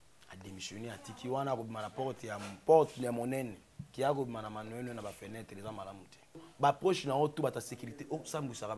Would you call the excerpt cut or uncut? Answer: cut